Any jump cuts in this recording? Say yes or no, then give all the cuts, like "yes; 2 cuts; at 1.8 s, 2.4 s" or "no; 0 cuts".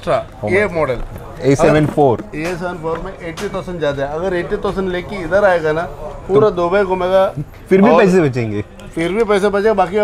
no; 0 cuts